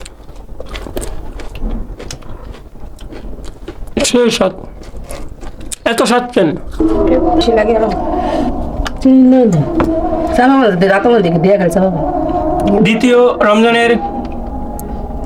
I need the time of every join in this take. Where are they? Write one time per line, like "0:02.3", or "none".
0:01.2
0:07.4